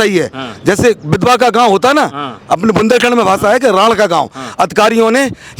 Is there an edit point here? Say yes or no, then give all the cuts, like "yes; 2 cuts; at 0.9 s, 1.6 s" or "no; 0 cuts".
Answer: no; 0 cuts